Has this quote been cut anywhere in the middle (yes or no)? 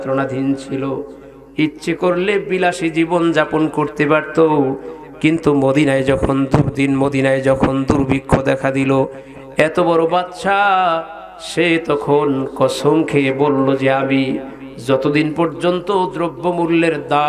no